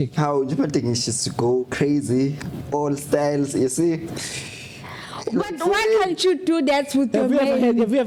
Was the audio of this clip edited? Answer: no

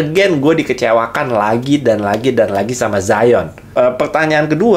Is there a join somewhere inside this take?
yes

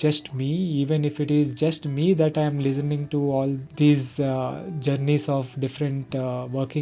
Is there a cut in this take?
no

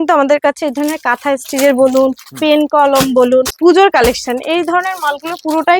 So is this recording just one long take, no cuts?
no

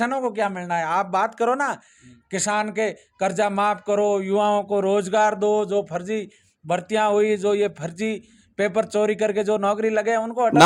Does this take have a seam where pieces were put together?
no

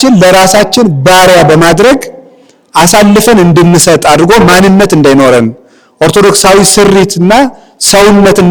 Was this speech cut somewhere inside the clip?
no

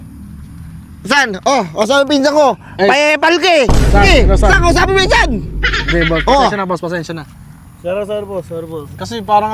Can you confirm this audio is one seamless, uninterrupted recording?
yes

